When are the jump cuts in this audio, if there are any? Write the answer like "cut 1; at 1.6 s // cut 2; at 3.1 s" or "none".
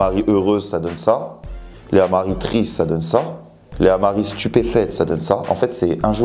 none